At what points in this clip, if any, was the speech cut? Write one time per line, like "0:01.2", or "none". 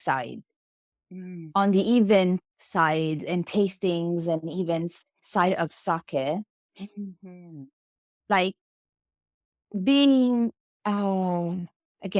none